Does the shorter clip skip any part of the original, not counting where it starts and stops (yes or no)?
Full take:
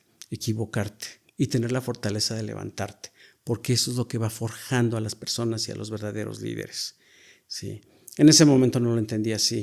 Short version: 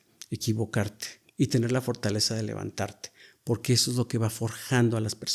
no